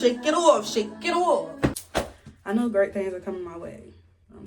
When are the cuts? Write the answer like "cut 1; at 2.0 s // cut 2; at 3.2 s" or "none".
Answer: cut 1; at 1.8 s